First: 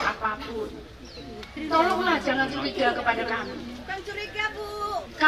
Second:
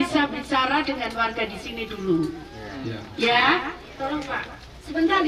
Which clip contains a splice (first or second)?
second